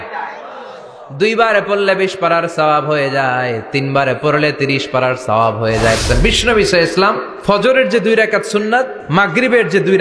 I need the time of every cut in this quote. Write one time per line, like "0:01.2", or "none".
0:06.0
0:07.3
0:09.0